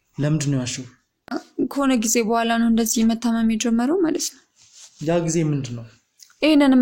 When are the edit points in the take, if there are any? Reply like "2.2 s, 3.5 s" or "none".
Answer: 1.4 s